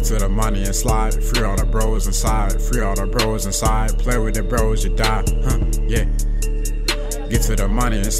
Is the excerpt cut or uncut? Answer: uncut